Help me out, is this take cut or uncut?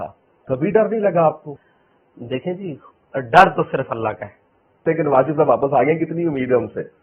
cut